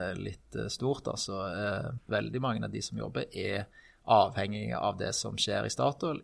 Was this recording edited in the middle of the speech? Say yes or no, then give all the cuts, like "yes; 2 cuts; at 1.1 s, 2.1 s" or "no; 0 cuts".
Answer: yes; 1 cut; at 2.0 s